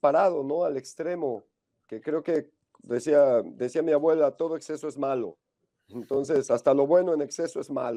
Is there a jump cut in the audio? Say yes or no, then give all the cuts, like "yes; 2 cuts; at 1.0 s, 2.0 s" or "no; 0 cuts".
no; 0 cuts